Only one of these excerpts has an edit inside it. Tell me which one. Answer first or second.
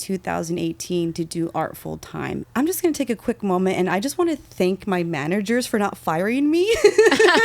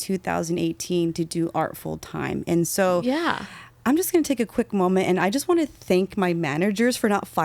first